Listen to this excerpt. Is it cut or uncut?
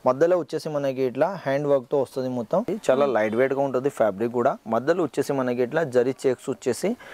cut